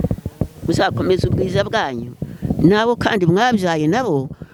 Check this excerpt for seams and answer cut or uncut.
uncut